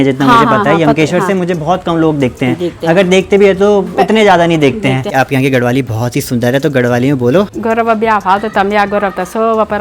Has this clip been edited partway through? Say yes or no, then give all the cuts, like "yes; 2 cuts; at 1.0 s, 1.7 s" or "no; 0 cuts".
yes; 2 cuts; at 5.1 s, 7.5 s